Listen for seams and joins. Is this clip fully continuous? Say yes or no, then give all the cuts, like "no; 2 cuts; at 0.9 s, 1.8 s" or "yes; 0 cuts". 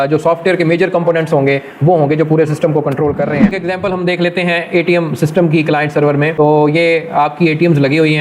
no; 1 cut; at 3.6 s